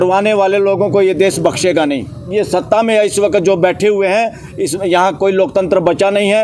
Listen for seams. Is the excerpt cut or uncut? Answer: cut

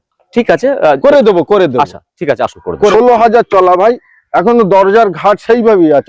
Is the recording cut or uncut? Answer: cut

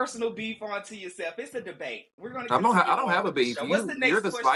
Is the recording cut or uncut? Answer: uncut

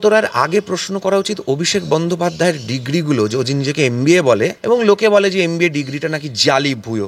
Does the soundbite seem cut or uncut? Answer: cut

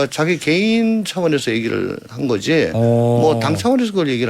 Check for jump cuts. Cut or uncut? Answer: uncut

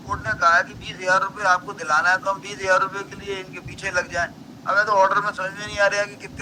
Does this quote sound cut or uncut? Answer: uncut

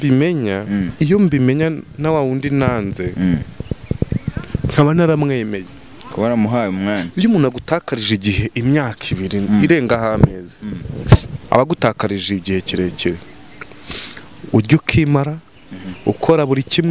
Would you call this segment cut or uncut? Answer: uncut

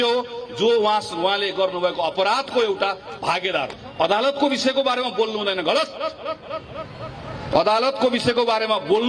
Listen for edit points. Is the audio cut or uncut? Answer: cut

